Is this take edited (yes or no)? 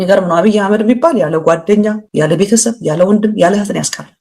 no